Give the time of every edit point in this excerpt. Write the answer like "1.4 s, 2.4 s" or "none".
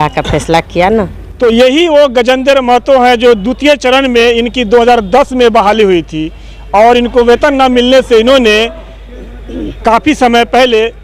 none